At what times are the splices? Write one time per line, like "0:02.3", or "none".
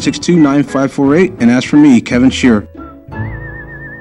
0:02.7

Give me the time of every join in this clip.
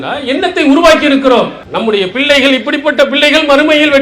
0:01.6

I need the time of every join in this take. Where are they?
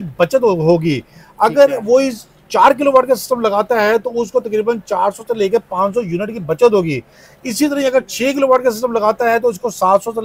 none

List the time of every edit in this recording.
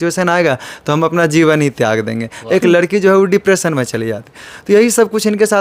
none

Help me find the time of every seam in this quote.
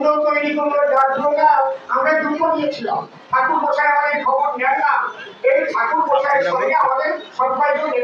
none

